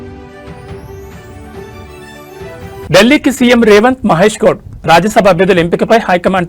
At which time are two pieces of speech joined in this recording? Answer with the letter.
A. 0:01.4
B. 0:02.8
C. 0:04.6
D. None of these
B